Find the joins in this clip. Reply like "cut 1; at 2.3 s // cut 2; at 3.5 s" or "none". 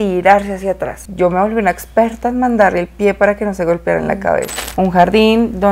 cut 1; at 4.5 s